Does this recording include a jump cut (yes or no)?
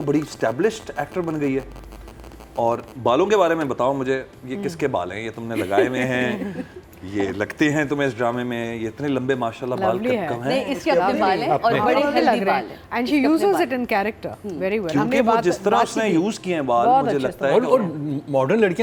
no